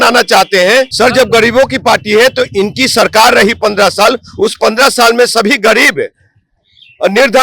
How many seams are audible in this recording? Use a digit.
1